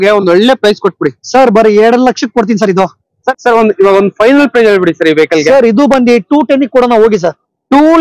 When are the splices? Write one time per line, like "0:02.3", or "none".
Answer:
0:03.2